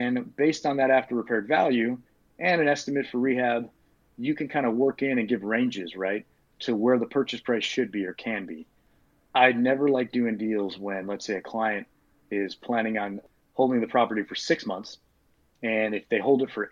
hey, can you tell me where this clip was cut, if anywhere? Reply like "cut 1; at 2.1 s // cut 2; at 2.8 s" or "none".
cut 1; at 8.9 s // cut 2; at 13.2 s